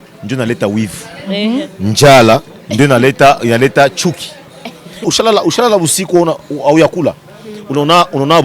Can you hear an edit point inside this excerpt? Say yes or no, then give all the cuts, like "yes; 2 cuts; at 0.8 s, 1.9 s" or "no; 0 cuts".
yes; 1 cut; at 5.1 s